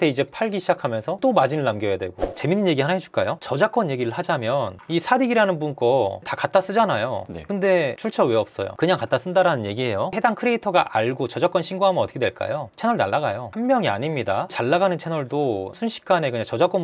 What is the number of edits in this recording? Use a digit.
3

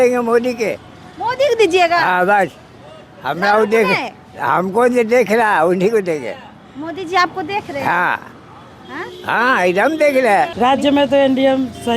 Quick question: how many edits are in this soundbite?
1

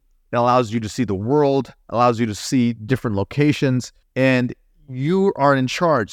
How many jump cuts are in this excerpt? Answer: 1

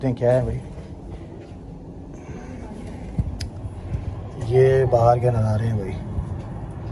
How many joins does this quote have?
0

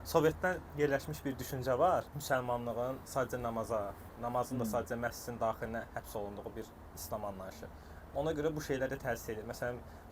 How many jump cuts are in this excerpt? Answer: 0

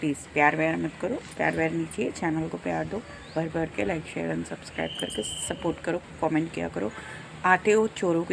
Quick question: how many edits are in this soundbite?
0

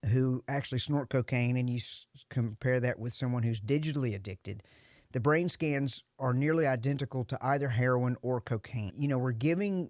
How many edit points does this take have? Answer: 1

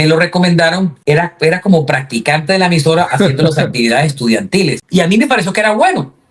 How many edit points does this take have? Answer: 2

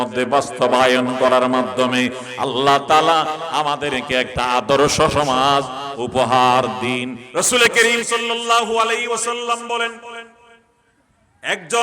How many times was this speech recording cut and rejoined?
1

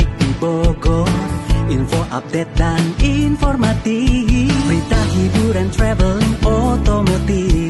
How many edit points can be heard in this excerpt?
0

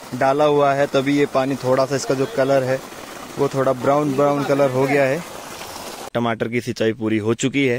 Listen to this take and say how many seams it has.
0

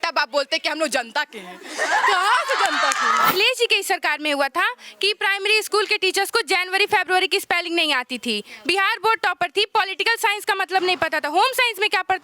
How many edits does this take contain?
1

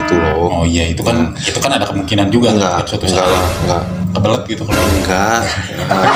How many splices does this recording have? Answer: 0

